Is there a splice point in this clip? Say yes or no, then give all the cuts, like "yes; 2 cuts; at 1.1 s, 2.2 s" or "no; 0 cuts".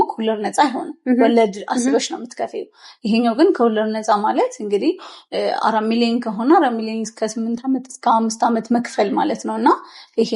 no; 0 cuts